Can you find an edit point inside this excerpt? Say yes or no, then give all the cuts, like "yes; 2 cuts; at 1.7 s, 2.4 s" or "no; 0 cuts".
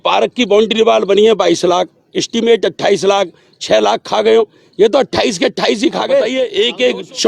yes; 1 cut; at 6.3 s